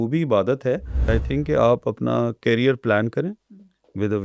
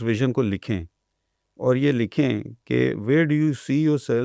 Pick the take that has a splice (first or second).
first